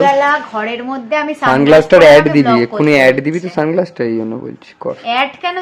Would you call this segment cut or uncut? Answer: uncut